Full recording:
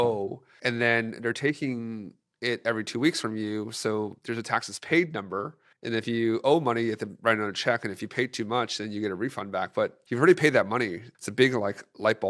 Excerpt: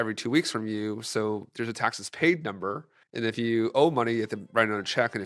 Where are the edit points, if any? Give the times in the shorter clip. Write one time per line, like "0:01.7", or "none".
none